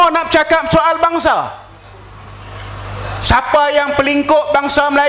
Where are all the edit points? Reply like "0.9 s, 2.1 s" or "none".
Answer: none